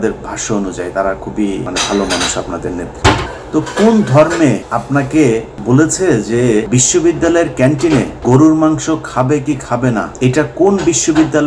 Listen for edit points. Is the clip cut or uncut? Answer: cut